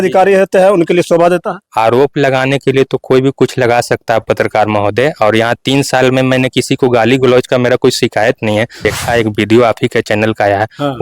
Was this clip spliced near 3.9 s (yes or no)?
no